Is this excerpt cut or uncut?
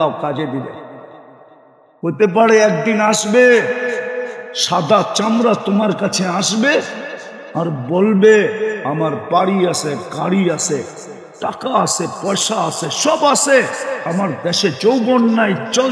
uncut